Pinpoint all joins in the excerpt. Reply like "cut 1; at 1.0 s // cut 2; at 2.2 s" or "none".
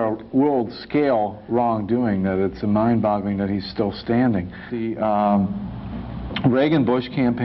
cut 1; at 4.8 s